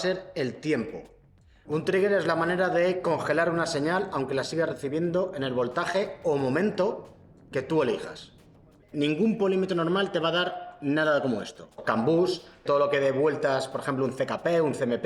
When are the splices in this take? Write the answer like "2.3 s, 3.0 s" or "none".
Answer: 1.7 s, 8.7 s, 11.8 s, 12.6 s